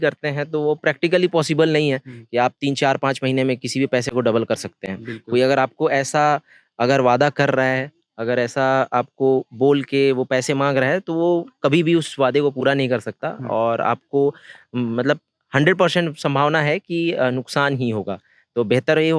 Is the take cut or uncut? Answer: uncut